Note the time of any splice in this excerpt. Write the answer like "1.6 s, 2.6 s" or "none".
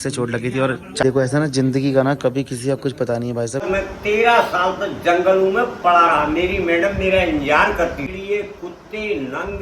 1.0 s, 3.6 s, 8.1 s

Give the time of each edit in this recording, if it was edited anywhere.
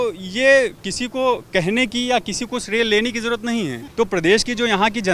3.8 s

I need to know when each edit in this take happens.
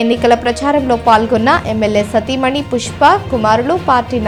none

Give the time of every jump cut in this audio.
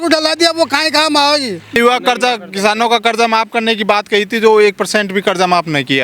1.7 s

